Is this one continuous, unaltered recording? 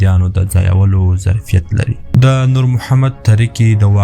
no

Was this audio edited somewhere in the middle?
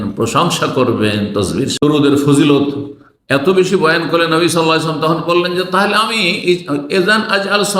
yes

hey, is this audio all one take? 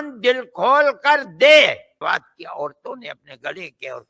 no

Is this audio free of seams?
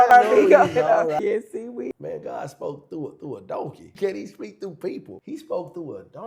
yes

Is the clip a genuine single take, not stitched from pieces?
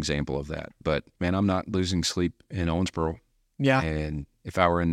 no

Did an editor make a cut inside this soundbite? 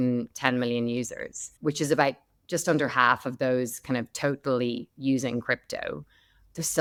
no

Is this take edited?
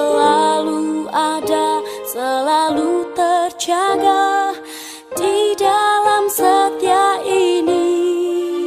no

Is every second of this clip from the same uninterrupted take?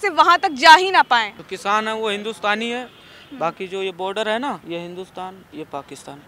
no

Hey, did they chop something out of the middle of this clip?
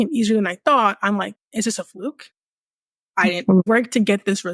yes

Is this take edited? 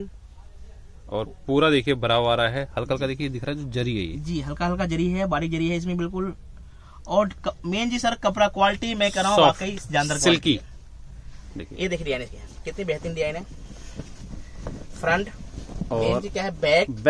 no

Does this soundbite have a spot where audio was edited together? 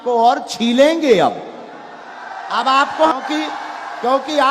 yes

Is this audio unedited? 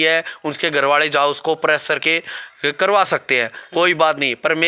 yes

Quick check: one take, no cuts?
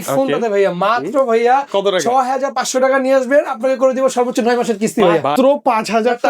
no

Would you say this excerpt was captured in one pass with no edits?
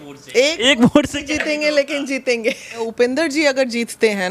no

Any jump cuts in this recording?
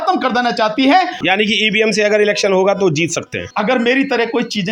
yes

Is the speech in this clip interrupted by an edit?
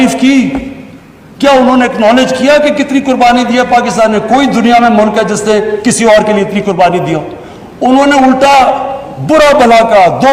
no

